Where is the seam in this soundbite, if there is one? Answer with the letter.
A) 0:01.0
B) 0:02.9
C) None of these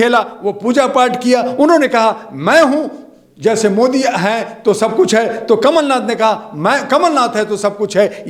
C